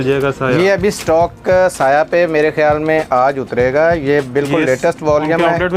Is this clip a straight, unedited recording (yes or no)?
yes